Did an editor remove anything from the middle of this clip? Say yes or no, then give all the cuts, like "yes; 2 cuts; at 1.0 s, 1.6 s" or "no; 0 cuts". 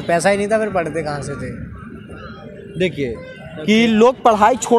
no; 0 cuts